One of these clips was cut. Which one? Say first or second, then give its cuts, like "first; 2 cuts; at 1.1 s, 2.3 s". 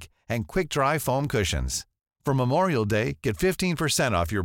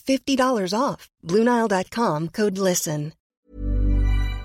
second; 1 cut; at 3.2 s